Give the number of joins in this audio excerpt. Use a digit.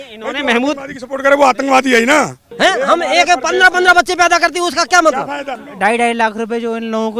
2